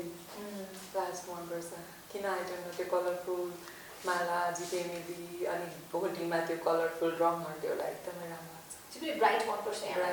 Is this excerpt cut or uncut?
uncut